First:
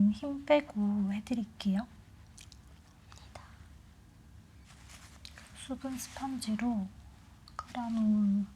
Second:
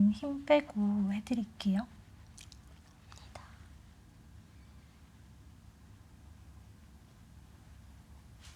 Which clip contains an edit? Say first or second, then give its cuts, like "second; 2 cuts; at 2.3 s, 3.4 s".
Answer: first; 1 cut; at 4.7 s